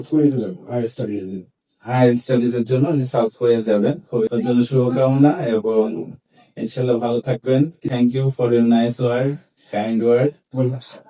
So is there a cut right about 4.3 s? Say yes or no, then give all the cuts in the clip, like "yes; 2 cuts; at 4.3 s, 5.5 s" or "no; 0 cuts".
yes; 2 cuts; at 4.3 s, 7.9 s